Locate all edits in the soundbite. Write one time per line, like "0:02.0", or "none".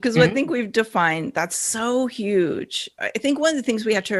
0:02.8